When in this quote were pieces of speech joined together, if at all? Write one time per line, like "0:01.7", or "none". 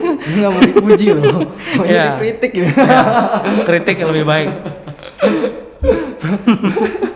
none